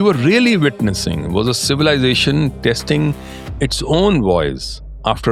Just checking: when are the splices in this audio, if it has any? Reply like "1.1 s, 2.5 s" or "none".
none